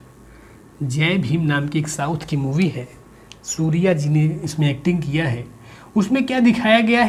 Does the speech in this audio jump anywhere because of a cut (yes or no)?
no